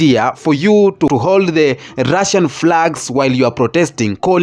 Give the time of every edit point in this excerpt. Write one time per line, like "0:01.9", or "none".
0:01.1